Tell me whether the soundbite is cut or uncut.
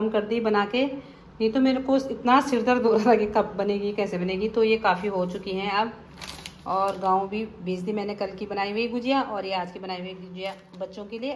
uncut